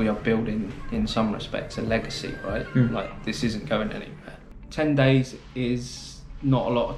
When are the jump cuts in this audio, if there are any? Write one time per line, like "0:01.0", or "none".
0:04.6